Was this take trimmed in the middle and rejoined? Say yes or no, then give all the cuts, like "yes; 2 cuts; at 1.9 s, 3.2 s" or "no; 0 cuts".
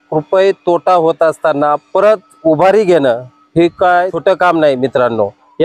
yes; 1 cut; at 4.2 s